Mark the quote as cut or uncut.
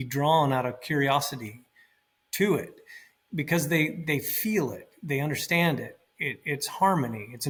uncut